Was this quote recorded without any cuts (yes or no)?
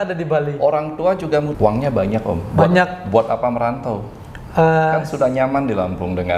no